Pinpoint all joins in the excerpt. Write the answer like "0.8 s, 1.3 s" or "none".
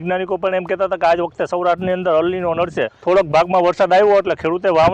2.9 s